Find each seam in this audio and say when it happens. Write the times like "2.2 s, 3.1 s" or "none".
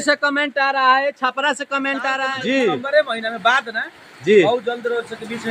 2.2 s